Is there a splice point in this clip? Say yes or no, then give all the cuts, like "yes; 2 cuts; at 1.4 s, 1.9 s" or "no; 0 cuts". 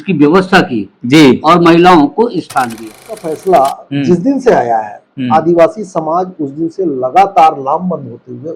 yes; 1 cut; at 3.1 s